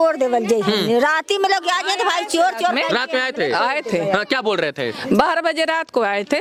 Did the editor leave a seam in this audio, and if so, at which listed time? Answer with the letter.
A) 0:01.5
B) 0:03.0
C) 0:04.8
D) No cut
D